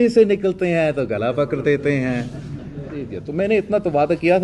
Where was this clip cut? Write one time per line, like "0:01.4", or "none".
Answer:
0:03.2